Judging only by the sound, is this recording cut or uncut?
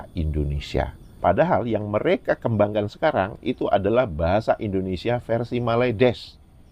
cut